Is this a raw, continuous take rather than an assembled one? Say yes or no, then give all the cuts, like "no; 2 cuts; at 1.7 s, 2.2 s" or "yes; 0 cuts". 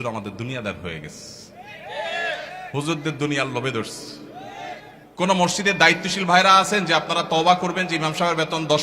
no; 1 cut; at 5.0 s